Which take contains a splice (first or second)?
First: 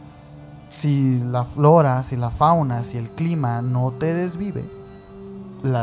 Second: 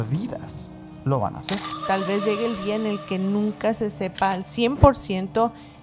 second